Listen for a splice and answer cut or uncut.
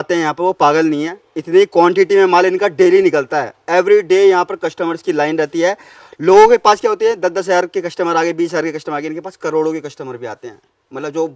uncut